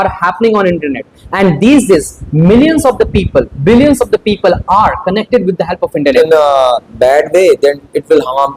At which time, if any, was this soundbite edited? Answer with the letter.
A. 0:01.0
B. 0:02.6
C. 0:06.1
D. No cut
C